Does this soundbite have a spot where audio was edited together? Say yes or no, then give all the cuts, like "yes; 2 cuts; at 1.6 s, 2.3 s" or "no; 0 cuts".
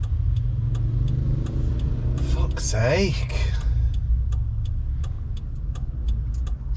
no; 0 cuts